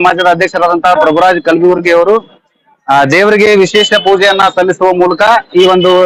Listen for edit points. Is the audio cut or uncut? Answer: uncut